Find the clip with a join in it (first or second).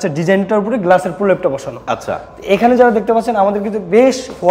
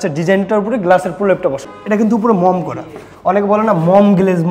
second